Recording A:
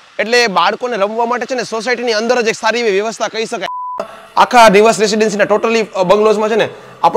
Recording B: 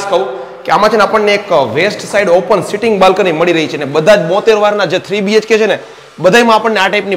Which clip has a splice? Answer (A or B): A